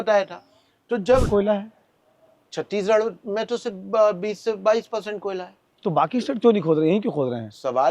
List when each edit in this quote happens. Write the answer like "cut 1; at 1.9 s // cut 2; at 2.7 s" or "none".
cut 1; at 1.3 s